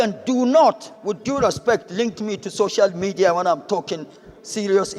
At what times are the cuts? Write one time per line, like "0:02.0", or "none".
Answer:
none